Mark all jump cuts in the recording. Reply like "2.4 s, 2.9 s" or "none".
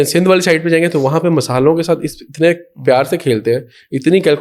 none

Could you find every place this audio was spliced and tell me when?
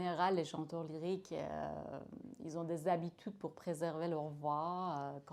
none

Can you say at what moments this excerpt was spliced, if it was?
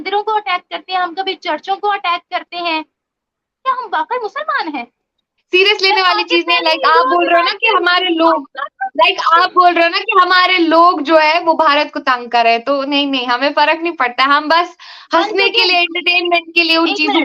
5.3 s

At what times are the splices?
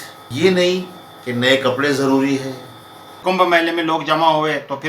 3.2 s

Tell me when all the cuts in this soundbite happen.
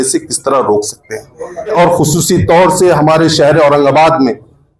1.7 s

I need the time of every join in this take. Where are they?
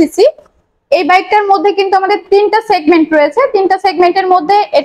none

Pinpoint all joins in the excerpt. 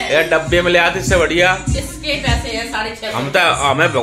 none

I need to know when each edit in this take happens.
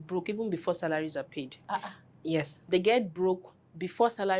1.6 s, 2.7 s

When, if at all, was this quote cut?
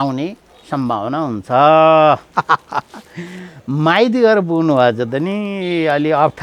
2.3 s

